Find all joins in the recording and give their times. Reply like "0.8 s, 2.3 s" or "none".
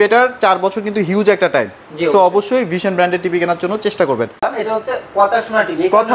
4.5 s